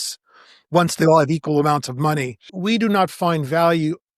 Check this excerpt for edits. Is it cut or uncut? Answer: cut